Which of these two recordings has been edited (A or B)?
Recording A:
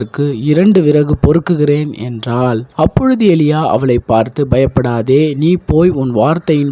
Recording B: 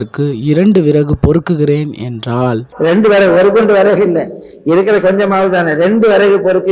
A